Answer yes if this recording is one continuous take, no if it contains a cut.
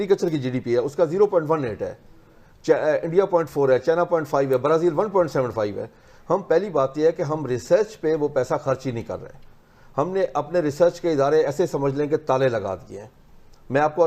yes